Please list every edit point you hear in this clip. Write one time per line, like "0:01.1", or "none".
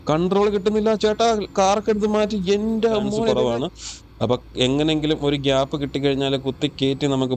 0:03.3